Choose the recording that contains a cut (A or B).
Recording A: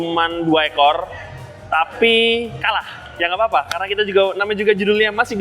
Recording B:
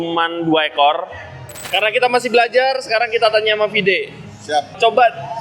B